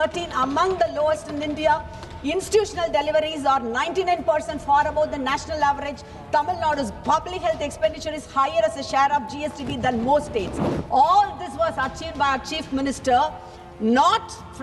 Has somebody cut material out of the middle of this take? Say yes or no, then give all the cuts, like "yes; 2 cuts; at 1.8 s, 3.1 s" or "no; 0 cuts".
no; 0 cuts